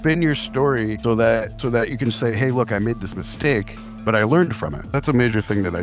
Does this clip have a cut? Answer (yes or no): yes